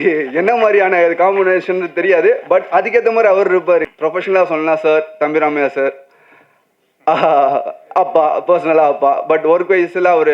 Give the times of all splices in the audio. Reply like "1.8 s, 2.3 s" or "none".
3.8 s